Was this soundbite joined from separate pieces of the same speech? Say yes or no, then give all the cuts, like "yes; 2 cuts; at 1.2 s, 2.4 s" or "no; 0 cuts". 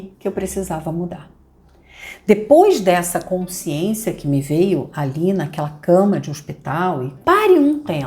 yes; 1 cut; at 7.1 s